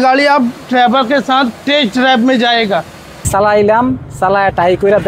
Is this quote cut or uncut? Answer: cut